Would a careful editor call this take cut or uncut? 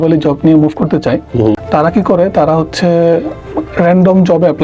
cut